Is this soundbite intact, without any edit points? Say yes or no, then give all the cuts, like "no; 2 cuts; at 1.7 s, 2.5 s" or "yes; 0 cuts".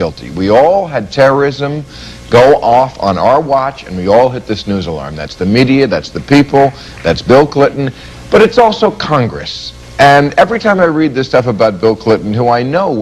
no; 1 cut; at 8.2 s